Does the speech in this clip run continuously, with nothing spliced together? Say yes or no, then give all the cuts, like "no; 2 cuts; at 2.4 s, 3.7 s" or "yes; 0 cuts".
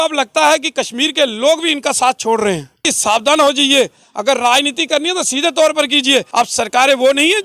no; 2 cuts; at 2.9 s, 6.3 s